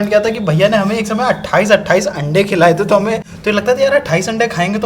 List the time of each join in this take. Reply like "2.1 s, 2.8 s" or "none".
3.3 s

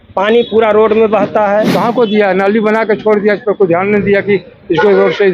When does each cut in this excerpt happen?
1.7 s

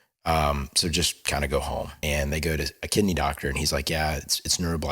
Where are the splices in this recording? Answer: 2.0 s

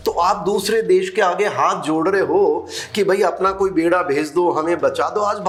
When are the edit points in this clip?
none

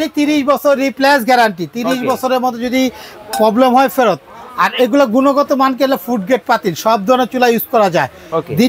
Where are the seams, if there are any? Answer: none

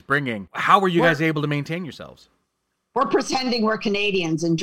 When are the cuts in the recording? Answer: none

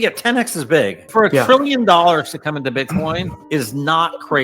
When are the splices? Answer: 1.0 s, 3.4 s

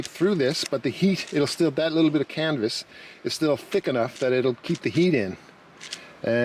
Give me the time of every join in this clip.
none

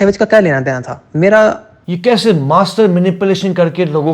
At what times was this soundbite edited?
1.9 s

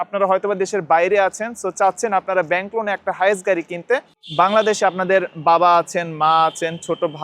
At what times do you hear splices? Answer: 4.2 s

